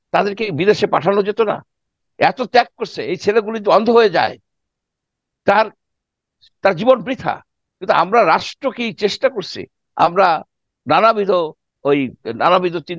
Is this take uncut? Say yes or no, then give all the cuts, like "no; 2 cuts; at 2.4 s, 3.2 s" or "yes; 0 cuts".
yes; 0 cuts